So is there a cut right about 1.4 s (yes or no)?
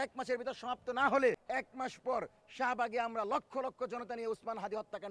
yes